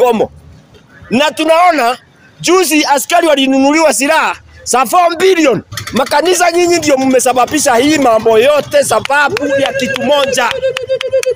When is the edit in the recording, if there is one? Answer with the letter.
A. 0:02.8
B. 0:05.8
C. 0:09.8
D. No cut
B